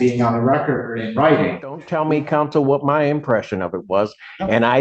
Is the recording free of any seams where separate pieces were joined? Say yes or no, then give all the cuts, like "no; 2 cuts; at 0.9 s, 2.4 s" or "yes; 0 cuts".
no; 1 cut; at 1.8 s